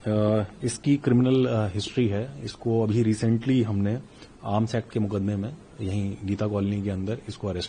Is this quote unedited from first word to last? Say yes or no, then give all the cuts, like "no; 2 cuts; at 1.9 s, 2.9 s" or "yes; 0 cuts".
yes; 0 cuts